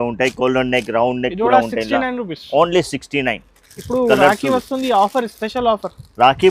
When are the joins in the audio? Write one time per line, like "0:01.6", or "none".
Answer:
none